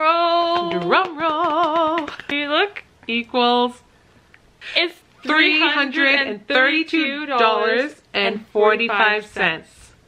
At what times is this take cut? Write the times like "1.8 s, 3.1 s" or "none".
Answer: 2.2 s, 4.6 s